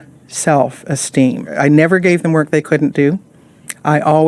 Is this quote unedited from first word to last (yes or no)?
no